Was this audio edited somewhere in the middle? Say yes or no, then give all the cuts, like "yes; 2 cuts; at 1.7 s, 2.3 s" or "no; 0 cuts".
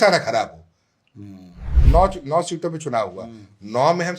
yes; 1 cut; at 1.6 s